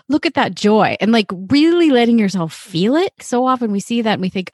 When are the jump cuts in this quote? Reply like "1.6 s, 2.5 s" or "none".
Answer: 3.2 s